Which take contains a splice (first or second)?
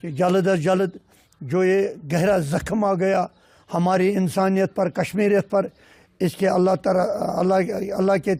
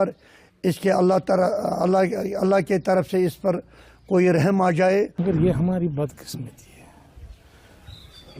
second